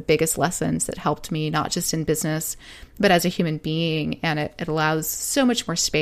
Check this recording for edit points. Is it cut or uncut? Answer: uncut